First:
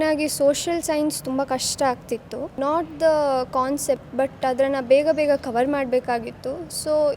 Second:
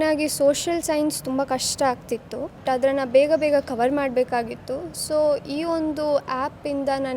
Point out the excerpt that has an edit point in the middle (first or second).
second